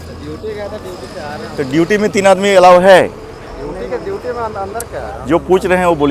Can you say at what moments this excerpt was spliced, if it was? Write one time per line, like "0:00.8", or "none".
none